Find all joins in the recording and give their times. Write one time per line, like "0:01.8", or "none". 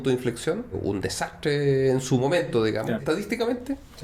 0:00.8
0:03.0